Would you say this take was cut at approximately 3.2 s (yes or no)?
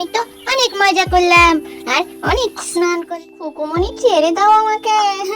yes